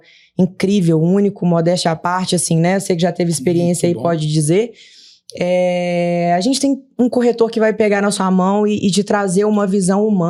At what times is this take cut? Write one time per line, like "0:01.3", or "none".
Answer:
none